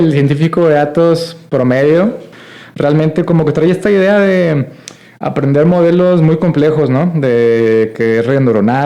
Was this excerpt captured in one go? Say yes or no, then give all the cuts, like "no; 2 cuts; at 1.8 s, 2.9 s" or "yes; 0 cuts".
no; 1 cut; at 2.3 s